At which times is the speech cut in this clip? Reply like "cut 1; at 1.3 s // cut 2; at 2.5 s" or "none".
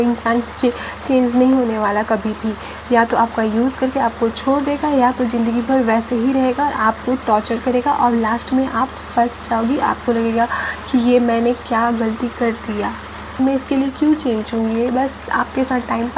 cut 1; at 13.4 s